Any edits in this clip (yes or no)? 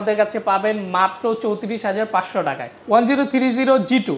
yes